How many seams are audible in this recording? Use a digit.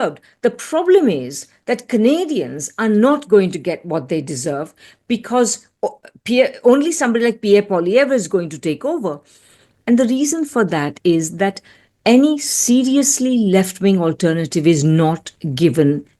0